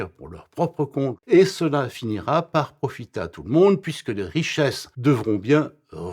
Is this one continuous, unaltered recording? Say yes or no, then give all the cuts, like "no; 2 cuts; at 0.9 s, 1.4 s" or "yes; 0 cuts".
no; 2 cuts; at 1.2 s, 4.9 s